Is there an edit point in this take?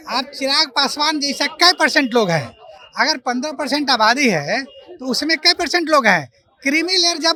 no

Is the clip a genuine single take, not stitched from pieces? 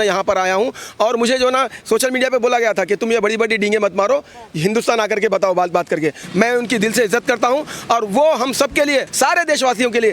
no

